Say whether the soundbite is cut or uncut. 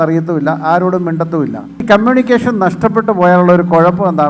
cut